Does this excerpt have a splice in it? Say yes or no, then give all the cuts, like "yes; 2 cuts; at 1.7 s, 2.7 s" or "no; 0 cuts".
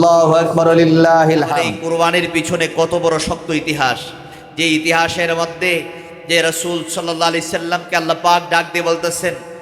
yes; 1 cut; at 1.7 s